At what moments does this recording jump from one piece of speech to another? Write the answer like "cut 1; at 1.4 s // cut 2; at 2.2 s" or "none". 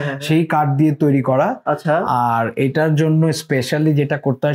none